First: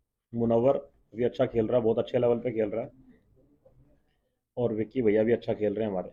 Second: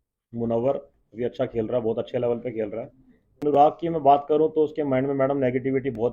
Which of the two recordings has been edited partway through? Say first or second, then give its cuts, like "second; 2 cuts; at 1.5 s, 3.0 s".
second; 1 cut; at 3.4 s